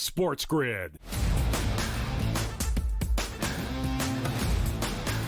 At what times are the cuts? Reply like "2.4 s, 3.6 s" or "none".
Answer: 1.0 s, 2.0 s